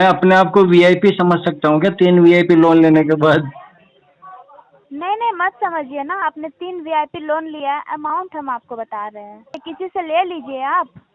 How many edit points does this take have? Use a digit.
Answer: 1